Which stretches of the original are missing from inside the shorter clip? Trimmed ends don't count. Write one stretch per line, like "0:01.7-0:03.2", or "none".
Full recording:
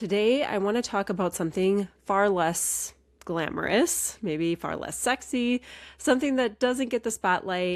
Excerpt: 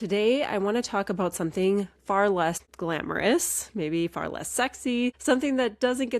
0:02.7-0:03.2
0:05.7-0:06.0

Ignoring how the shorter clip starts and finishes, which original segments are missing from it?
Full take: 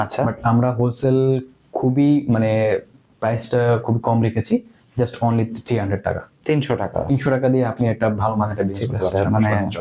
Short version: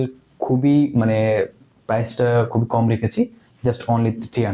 none

